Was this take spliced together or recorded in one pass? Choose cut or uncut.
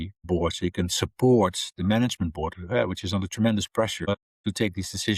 uncut